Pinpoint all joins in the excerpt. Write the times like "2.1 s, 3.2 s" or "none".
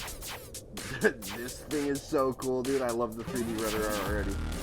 none